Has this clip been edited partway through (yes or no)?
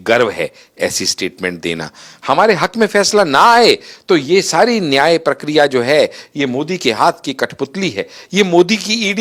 no